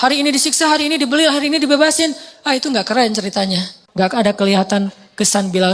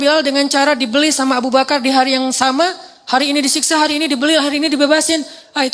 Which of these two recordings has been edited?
first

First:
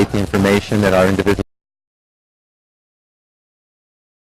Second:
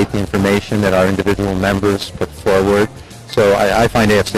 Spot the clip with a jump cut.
second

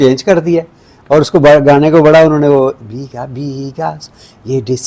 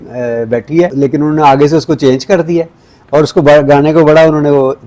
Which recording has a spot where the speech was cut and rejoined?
second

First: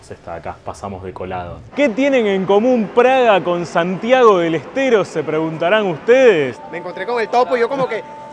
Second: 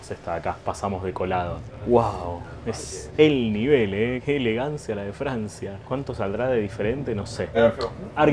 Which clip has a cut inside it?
first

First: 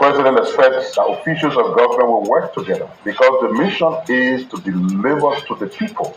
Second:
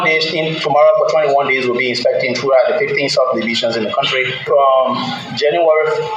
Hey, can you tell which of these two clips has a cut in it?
second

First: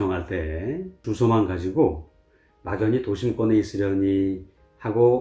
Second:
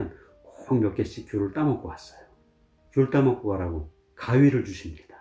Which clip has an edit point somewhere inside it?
first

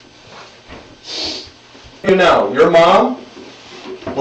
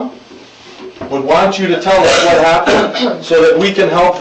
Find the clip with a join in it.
first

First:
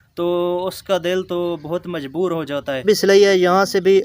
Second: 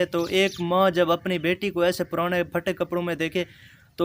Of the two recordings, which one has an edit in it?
first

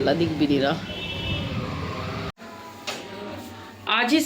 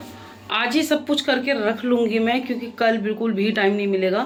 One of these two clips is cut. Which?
first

